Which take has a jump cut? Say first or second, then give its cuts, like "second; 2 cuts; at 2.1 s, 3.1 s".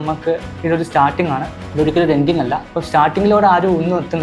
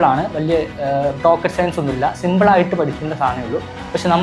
first; 2 cuts; at 1.6 s, 2.7 s